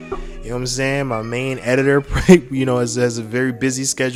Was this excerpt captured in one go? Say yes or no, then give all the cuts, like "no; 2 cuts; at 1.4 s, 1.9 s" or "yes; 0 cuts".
yes; 0 cuts